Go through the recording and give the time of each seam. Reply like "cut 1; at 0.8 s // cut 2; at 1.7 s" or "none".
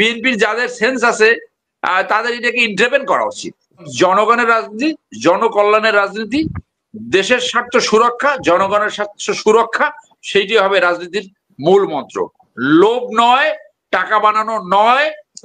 cut 1; at 3.9 s